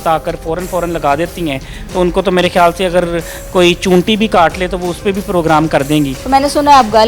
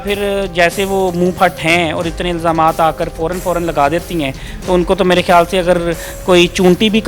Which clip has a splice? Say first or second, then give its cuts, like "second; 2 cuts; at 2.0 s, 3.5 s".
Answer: first; 1 cut; at 6.2 s